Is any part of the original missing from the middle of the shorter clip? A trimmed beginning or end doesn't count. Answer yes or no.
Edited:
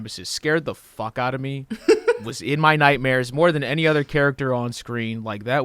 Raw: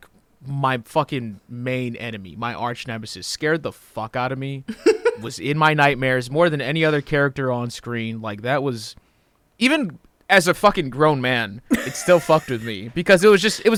no